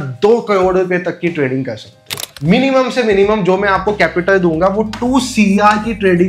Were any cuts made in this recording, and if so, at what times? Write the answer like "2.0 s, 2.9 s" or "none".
none